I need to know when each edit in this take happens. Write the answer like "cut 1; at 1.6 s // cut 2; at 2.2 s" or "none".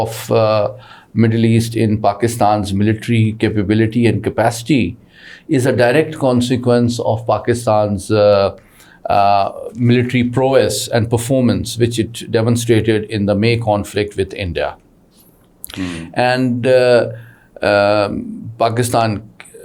none